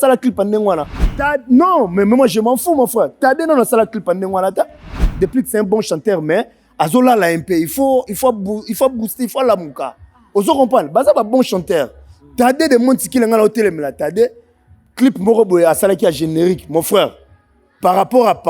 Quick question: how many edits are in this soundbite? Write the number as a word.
two